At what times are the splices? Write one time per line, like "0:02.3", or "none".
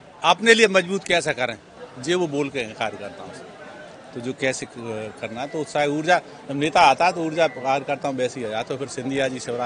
none